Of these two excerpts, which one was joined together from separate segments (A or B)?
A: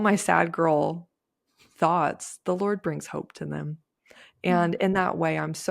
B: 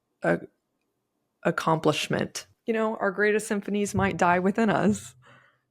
B